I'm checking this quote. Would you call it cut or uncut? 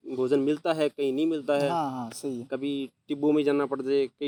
uncut